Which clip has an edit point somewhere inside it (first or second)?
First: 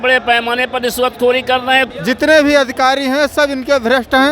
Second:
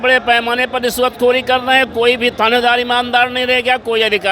first